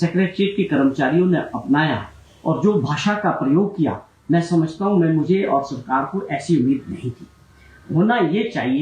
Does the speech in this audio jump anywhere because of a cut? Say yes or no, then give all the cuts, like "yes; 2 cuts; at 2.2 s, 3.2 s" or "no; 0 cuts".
no; 0 cuts